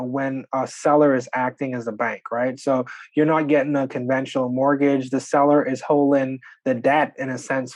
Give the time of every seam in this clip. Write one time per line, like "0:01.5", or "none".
none